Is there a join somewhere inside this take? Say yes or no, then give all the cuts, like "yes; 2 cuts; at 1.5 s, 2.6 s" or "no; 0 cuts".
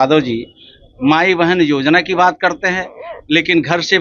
no; 0 cuts